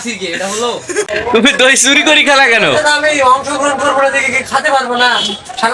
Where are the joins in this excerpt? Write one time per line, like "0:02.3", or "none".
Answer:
0:01.1